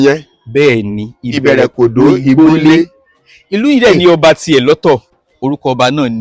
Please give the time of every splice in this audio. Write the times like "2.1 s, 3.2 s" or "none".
5.1 s